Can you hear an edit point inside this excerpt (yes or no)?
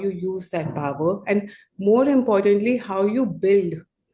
no